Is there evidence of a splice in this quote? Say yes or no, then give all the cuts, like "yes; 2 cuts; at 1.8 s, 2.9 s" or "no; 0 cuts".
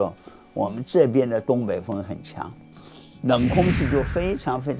no; 0 cuts